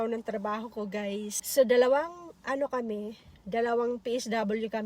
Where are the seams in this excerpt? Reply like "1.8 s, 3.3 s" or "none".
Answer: 1.4 s